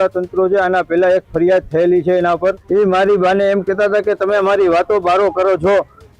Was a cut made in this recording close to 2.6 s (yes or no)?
yes